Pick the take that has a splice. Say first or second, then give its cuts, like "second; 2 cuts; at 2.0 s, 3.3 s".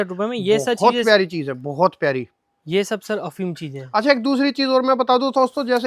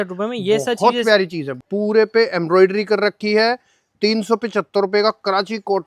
second; 1 cut; at 1.7 s